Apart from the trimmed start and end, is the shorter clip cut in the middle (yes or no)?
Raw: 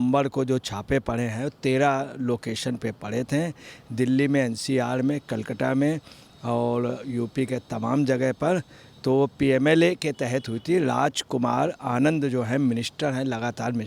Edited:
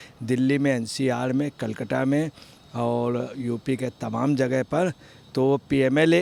no